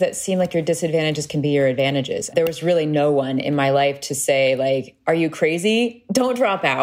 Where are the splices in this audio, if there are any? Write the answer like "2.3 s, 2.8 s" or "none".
2.2 s

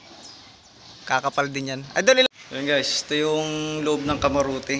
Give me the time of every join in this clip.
2.2 s

